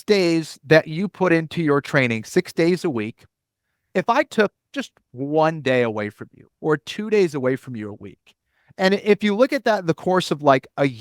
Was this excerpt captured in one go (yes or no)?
yes